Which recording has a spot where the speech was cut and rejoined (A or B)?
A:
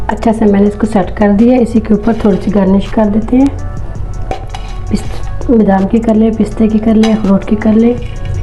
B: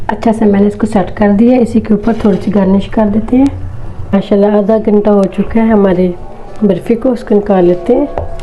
B